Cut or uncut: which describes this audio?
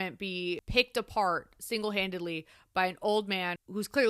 uncut